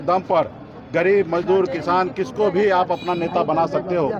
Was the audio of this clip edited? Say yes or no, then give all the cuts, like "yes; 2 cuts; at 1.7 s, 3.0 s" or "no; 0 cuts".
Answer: no; 0 cuts